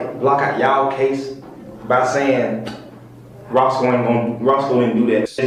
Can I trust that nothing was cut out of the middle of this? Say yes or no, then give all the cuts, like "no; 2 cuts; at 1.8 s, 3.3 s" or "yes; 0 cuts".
yes; 0 cuts